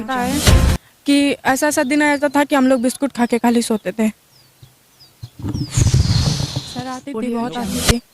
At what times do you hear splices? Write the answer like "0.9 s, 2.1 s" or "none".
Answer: 6.9 s